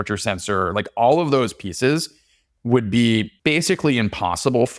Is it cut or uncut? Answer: cut